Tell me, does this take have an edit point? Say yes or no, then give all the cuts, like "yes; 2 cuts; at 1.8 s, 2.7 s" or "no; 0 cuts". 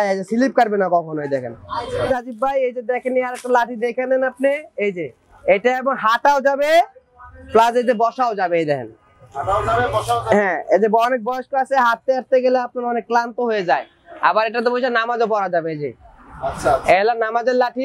yes; 1 cut; at 2.1 s